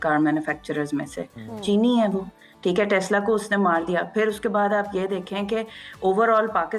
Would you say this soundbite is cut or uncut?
uncut